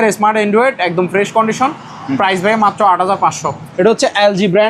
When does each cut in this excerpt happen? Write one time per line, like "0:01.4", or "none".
0:03.6